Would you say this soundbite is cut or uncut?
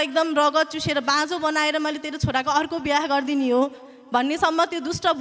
uncut